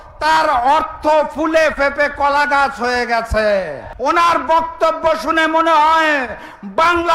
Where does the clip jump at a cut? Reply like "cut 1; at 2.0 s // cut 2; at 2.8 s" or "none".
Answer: cut 1; at 3.8 s